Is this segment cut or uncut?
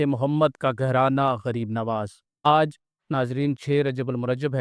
cut